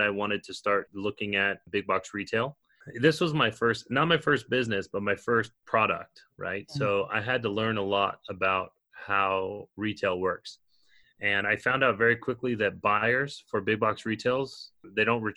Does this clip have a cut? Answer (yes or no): yes